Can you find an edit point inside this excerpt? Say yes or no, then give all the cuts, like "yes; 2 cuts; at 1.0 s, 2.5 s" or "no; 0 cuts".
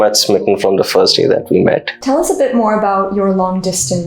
yes; 1 cut; at 1.9 s